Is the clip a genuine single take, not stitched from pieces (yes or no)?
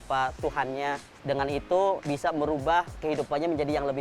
no